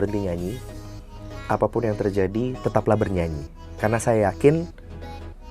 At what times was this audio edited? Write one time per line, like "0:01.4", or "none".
none